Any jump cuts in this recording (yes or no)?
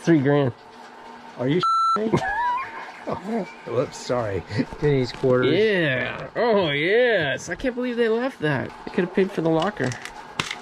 yes